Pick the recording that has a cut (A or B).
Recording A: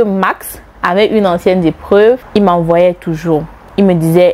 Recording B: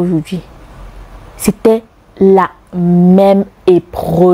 A